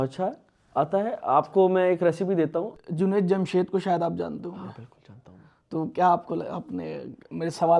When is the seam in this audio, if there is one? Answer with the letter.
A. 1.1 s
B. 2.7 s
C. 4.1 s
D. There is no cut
B